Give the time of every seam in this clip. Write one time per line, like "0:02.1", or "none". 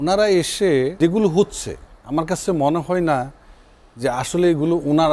0:00.9